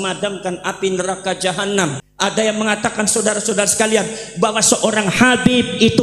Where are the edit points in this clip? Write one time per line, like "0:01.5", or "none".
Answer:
0:02.0